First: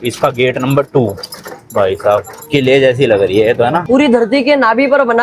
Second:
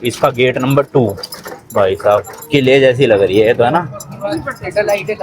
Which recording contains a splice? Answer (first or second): first